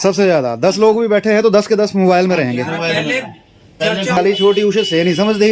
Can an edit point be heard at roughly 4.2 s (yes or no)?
yes